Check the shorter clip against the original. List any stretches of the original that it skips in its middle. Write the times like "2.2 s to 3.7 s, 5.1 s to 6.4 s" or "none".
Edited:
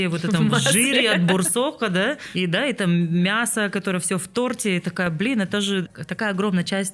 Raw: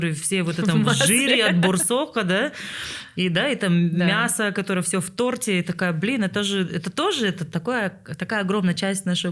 2.6 s to 3.1 s, 6.7 s to 8.0 s

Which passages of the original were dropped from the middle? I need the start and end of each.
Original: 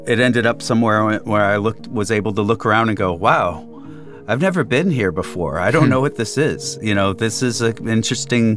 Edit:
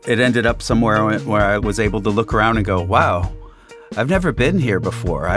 1.6 s to 1.9 s

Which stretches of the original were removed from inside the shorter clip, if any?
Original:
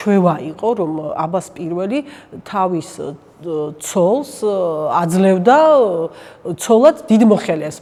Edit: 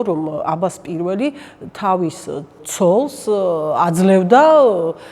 3.4 s to 3.8 s

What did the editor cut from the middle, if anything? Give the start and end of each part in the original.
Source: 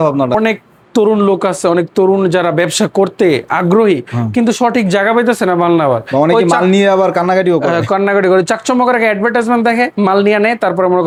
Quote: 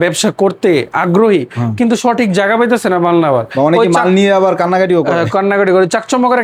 none

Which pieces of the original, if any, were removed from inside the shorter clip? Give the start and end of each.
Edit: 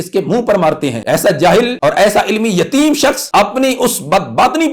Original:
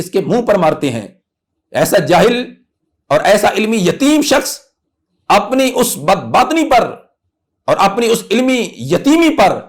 1.0 s to 1.7 s, 2.4 s to 3.0 s, 4.5 s to 5.2 s

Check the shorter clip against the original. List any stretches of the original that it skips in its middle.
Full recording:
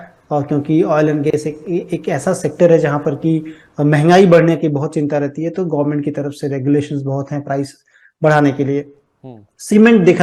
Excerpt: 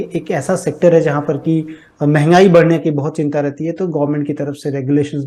none

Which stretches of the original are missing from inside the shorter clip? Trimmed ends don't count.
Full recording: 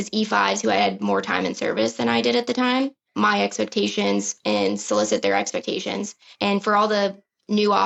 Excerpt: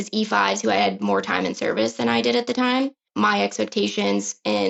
none

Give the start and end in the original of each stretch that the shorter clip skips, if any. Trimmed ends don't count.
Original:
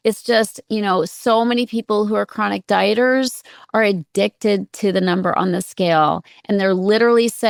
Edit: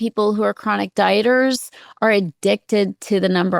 none

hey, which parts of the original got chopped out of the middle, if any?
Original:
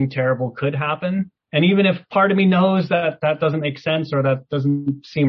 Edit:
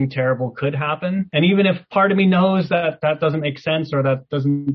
1.3 s to 1.5 s

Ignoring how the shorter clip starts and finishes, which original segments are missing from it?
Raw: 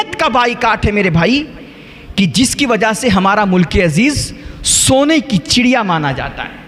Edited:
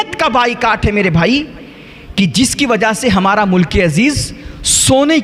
none

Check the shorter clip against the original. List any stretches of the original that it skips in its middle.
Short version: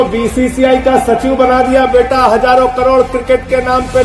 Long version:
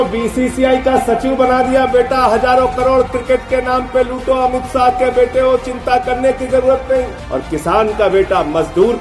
none

